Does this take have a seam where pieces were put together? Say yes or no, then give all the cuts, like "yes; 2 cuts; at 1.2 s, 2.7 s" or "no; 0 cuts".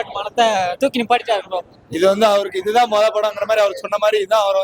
yes; 1 cut; at 1.7 s